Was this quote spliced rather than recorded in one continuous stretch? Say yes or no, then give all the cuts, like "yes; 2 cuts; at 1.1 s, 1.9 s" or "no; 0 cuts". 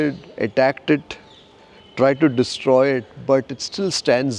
no; 0 cuts